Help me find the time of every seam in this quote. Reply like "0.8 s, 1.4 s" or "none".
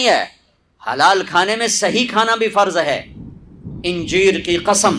3.7 s